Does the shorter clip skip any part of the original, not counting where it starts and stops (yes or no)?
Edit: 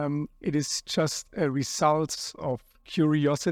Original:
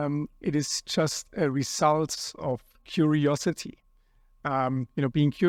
no